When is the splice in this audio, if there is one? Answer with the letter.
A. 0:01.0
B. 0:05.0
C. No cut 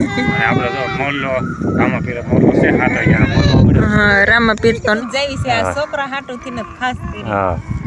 B